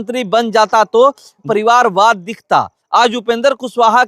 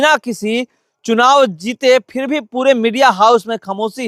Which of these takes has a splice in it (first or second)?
first